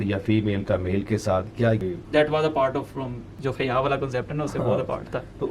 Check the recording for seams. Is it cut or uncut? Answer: cut